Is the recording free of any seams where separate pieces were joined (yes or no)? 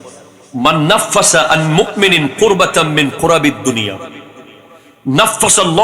yes